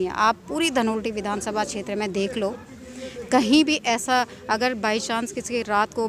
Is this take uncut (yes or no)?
yes